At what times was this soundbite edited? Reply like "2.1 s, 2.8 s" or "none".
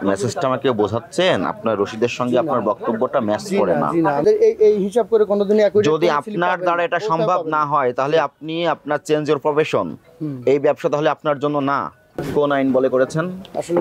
4.2 s, 12.3 s